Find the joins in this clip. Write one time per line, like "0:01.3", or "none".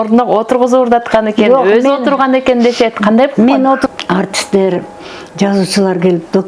0:03.9